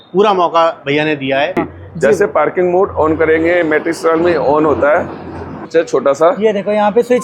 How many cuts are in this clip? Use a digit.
2